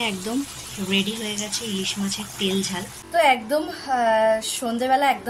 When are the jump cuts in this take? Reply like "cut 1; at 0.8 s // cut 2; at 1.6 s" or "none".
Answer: cut 1; at 3.0 s